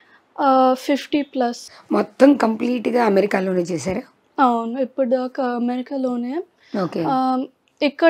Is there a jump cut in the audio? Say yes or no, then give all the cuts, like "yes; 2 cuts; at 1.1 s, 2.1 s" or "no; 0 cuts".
yes; 1 cut; at 1.7 s